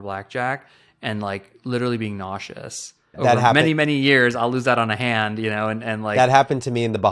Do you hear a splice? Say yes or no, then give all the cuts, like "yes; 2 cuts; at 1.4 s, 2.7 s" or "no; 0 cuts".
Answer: yes; 1 cut; at 3.2 s